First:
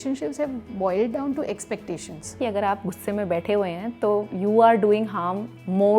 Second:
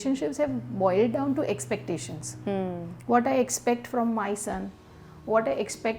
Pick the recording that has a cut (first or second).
first